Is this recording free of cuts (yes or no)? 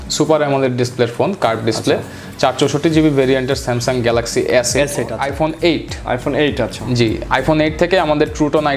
no